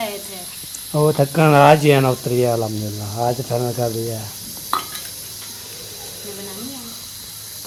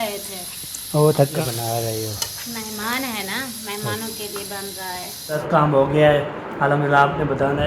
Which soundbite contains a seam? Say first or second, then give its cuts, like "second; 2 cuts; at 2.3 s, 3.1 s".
second; 2 cuts; at 1.3 s, 5.4 s